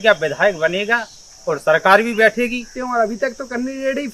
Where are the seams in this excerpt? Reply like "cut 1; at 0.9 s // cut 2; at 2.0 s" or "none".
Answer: cut 1; at 2.7 s